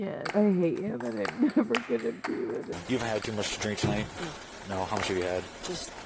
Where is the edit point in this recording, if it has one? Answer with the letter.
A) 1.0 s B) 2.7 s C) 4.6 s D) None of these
B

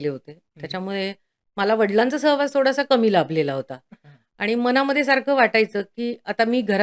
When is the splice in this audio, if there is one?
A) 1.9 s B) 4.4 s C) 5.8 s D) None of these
D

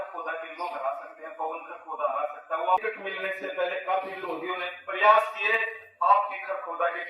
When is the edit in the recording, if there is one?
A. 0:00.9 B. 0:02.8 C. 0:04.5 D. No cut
B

